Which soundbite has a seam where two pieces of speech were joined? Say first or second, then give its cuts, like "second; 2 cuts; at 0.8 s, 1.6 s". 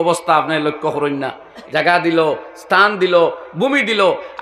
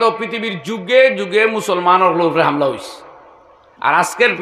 first; 1 cut; at 1.5 s